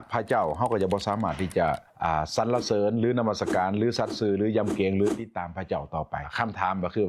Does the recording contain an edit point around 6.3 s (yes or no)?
yes